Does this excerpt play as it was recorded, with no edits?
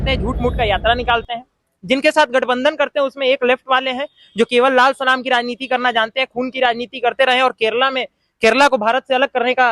yes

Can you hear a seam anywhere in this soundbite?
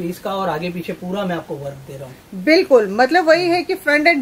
no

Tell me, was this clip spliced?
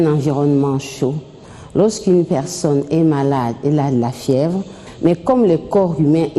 yes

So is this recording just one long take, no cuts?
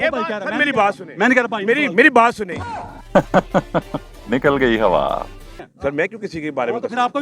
no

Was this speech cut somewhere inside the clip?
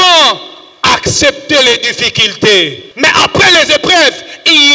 yes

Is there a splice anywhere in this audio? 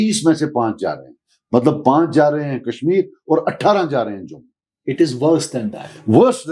no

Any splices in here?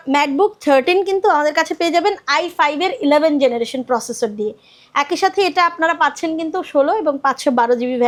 no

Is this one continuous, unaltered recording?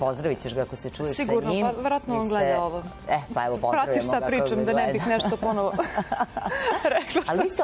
yes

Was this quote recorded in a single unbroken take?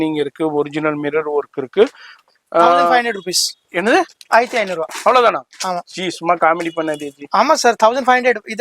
no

